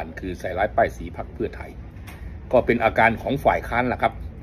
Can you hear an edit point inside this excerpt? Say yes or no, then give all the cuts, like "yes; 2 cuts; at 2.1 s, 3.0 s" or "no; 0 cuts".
no; 0 cuts